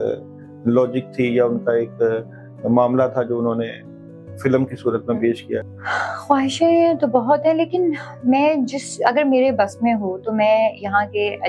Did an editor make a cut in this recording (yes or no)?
yes